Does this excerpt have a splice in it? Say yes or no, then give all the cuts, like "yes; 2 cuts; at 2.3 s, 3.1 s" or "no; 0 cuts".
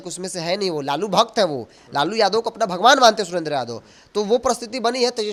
no; 0 cuts